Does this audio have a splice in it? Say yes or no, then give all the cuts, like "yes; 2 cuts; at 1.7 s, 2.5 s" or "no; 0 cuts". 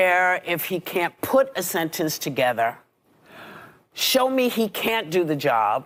no; 0 cuts